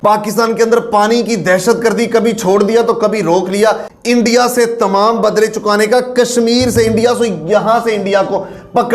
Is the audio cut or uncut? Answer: cut